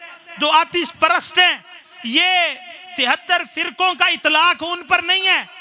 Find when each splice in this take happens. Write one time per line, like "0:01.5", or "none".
none